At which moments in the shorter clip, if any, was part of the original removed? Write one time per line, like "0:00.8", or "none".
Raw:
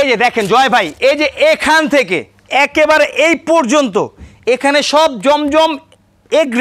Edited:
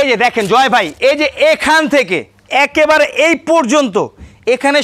none

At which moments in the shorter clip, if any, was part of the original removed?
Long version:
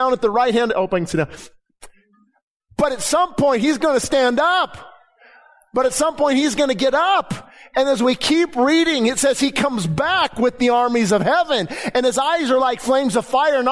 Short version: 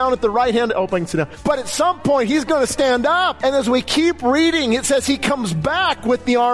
0:01.3
0:03.3

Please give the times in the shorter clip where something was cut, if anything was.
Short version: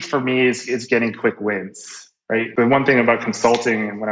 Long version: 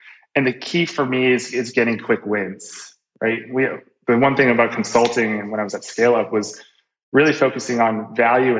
0:02.3

